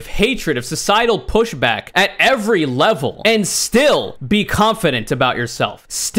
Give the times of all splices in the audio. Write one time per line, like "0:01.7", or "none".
none